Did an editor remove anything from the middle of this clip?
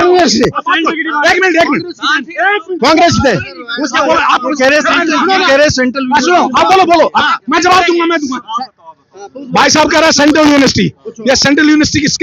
no; 0 cuts

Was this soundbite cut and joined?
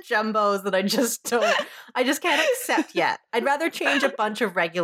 no; 0 cuts

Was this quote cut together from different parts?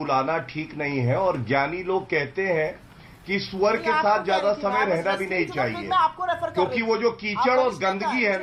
no; 0 cuts

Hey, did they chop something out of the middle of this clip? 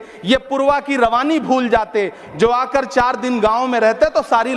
no; 0 cuts

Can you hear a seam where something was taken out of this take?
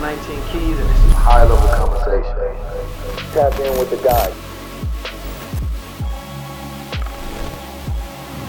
yes; 1 cut; at 4.3 s

